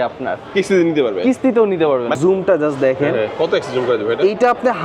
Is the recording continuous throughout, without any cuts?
no; 1 cut; at 2.2 s

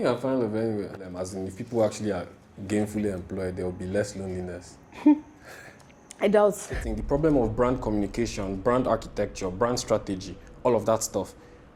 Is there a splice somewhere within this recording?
yes; 2 cuts; at 1.0 s, 6.8 s

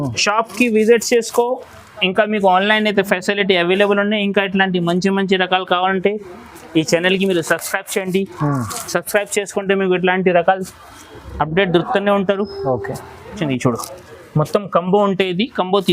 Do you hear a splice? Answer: yes; 1 cut; at 13.4 s

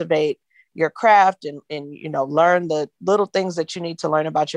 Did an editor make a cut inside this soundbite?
no; 0 cuts

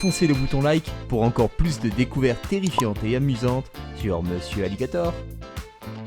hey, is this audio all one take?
no; 1 cut; at 5.1 s

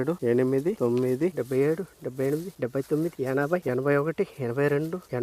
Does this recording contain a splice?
yes; 1 cut; at 1.3 s

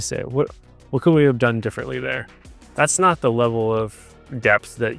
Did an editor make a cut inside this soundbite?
no; 0 cuts

